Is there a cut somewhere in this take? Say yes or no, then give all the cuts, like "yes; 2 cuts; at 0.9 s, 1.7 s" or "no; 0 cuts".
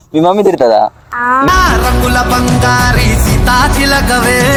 no; 0 cuts